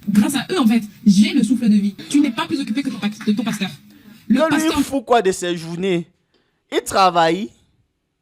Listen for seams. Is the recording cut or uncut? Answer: cut